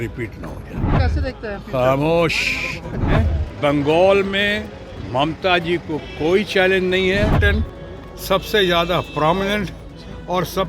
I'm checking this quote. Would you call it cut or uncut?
cut